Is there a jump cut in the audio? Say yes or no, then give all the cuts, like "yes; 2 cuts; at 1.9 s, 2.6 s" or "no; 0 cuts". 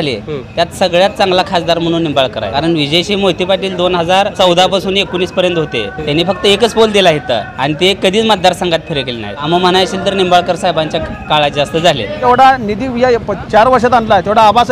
yes; 6 cuts; at 2.5 s, 4.3 s, 6.0 s, 7.5 s, 9.4 s, 12.2 s